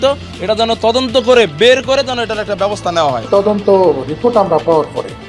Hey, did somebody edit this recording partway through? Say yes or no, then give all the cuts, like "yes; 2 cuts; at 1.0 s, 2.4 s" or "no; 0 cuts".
yes; 1 cut; at 3.2 s